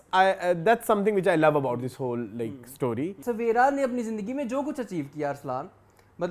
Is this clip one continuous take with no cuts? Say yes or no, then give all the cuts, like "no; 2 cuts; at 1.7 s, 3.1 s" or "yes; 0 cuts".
no; 1 cut; at 3.2 s